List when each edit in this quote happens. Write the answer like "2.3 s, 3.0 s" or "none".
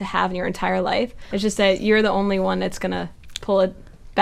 1.3 s